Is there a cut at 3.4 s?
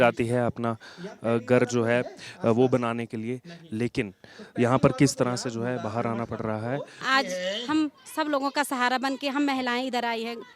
no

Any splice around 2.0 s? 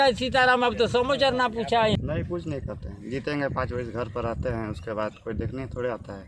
yes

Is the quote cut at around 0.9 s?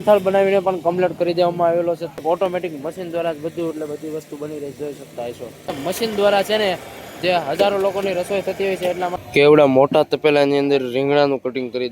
no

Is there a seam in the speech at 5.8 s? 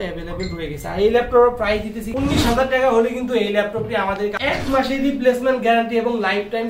no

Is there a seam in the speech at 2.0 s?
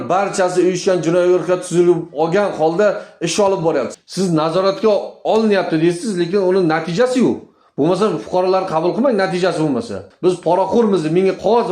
no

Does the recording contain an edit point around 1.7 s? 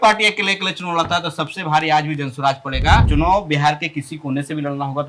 no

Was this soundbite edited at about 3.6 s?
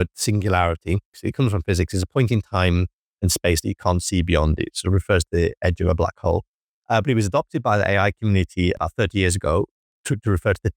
no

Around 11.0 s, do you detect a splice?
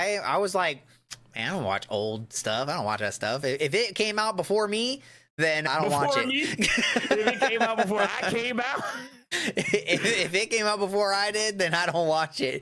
no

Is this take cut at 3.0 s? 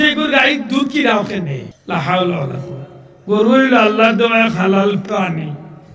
no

